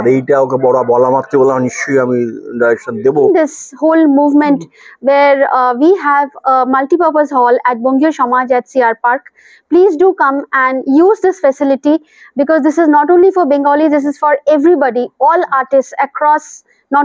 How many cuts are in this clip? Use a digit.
1